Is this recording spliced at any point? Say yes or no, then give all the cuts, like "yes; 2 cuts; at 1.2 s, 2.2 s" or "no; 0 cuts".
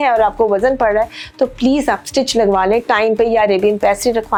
no; 0 cuts